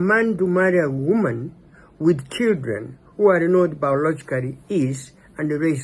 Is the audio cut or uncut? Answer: uncut